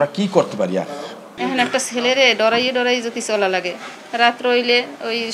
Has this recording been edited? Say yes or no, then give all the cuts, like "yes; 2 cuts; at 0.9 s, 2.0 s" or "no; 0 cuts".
yes; 1 cut; at 1.3 s